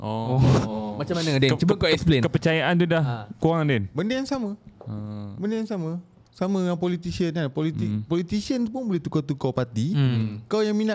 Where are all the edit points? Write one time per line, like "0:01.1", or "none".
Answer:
none